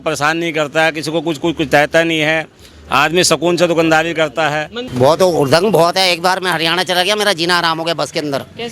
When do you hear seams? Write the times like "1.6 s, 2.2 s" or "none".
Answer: 4.8 s

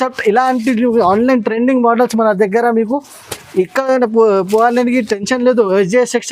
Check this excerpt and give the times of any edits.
none

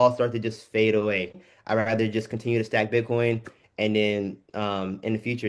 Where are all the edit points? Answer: 1.4 s

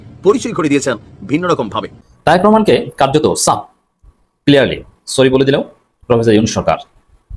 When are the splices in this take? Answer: 1.9 s

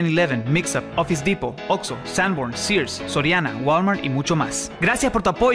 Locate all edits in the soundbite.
none

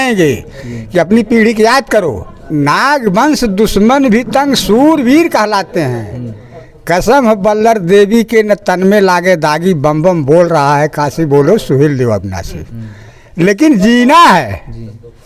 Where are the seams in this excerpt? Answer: 2.3 s

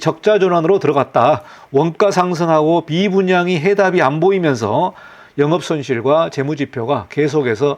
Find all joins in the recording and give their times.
none

